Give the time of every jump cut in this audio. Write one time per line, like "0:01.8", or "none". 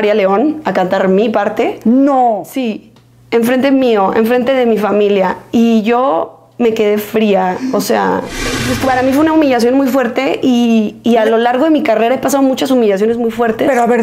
0:08.6